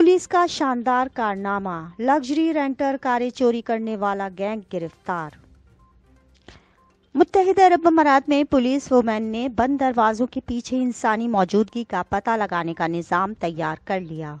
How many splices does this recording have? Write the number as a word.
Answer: one